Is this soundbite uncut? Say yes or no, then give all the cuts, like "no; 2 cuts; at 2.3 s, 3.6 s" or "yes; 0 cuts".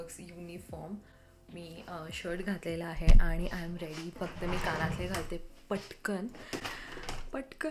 yes; 0 cuts